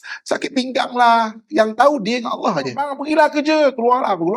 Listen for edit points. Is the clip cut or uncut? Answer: cut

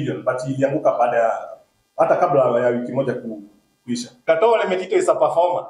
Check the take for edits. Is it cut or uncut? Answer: cut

